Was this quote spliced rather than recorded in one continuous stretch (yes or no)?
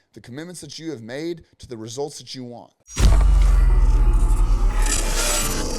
yes